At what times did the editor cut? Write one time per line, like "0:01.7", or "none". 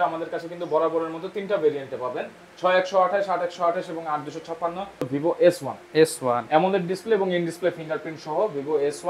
0:05.1